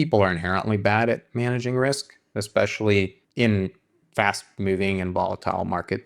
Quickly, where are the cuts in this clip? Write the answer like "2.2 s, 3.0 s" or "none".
3.2 s

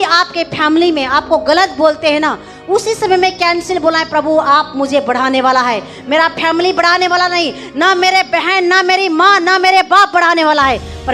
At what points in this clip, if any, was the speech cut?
none

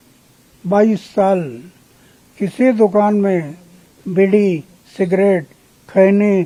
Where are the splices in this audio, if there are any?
none

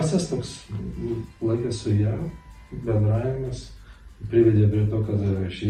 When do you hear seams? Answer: none

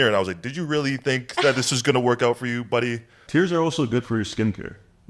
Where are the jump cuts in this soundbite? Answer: 3.1 s

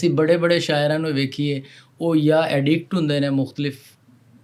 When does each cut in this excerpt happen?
none

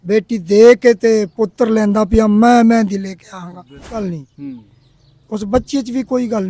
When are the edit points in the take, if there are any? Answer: 3.8 s

